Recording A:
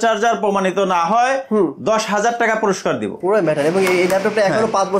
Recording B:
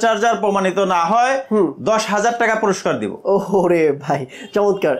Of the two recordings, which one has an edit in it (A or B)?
A